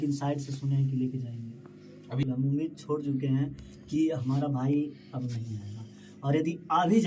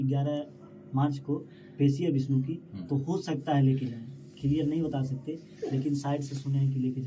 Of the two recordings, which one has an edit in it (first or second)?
first